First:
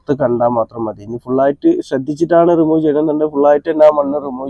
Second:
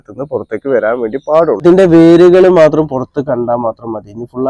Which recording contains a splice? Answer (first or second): second